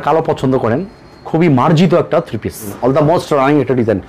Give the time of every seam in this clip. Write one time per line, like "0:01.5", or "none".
0:02.7